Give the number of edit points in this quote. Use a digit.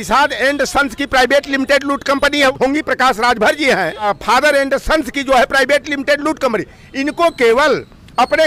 2